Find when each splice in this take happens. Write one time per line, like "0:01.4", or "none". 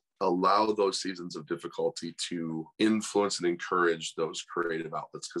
none